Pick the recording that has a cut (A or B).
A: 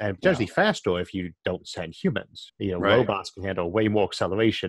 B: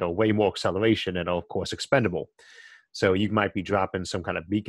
A